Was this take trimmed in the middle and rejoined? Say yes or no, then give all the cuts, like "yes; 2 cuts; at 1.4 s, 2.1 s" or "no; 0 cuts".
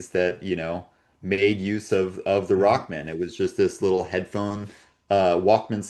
no; 0 cuts